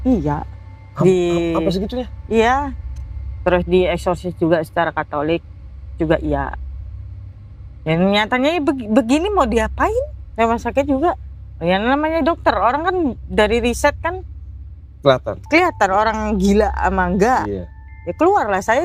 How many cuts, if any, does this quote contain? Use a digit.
2